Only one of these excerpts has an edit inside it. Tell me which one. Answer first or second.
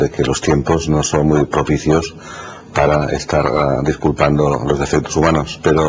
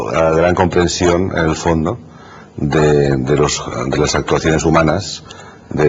first